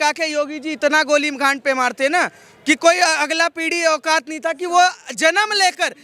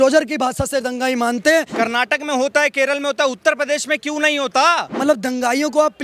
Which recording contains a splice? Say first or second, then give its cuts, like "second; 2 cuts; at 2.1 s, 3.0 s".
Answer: second; 2 cuts; at 1.7 s, 4.9 s